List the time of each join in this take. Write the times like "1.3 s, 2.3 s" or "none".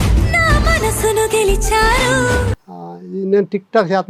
2.6 s